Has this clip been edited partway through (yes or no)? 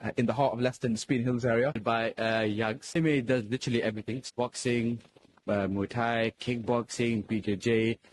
yes